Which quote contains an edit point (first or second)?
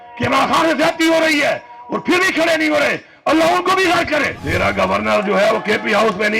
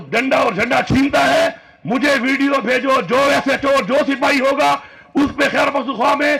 first